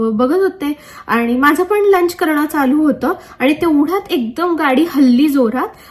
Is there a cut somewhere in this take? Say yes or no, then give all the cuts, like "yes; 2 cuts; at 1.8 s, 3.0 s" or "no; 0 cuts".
no; 0 cuts